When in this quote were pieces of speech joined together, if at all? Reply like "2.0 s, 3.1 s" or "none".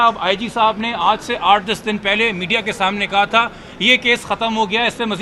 none